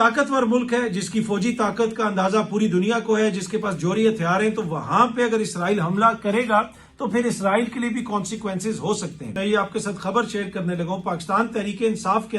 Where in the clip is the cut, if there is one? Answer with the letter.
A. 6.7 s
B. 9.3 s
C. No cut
B